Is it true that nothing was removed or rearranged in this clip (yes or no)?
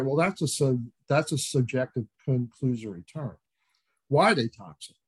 yes